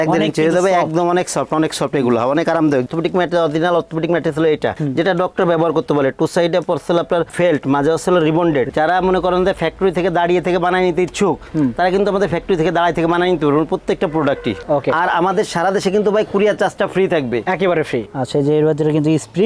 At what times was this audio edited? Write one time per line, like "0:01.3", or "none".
0:02.9
0:08.7
0:14.6
0:18.1